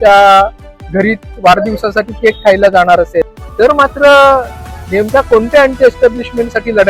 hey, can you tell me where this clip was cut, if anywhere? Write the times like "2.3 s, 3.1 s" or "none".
3.3 s